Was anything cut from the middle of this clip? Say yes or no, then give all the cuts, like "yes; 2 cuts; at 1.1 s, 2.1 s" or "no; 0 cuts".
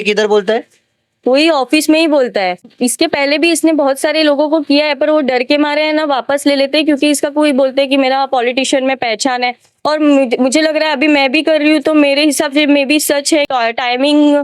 yes; 2 cuts; at 2.7 s, 13.5 s